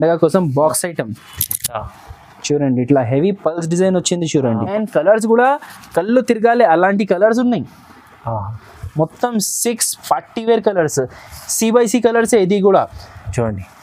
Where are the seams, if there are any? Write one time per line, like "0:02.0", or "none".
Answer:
0:04.7